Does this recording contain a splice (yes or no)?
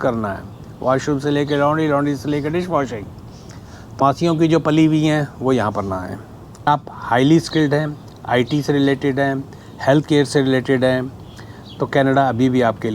yes